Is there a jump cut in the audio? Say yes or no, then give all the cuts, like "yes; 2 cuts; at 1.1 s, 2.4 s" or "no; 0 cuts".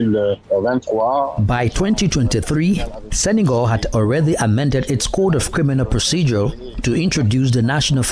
no; 0 cuts